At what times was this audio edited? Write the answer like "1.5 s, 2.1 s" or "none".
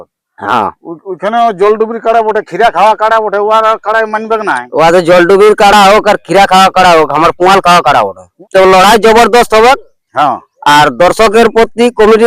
8.3 s